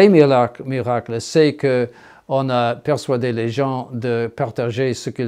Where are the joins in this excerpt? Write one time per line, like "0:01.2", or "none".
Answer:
none

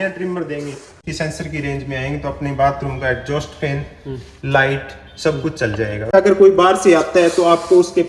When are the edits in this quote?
0:01.0
0:06.1

